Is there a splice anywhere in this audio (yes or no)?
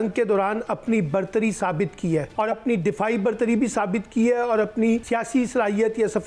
yes